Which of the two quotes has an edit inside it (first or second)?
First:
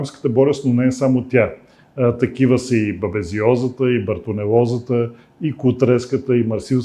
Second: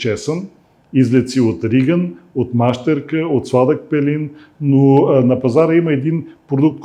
second